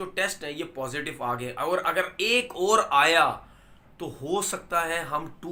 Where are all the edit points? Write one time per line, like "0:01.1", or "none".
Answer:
none